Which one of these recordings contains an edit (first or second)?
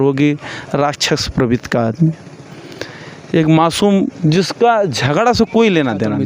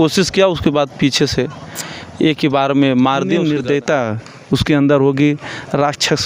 second